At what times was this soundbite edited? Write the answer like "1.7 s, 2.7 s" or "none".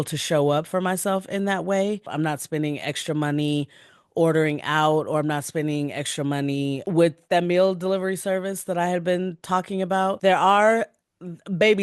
2.1 s, 7.0 s, 10.2 s